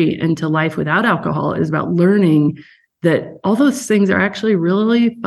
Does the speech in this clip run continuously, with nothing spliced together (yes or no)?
yes